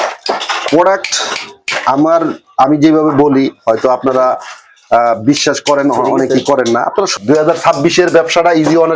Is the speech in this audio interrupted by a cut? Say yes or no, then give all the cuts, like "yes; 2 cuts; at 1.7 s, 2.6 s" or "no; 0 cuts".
yes; 1 cut; at 7.1 s